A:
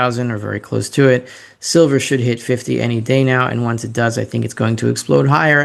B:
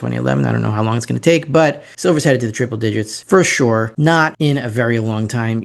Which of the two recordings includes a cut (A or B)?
B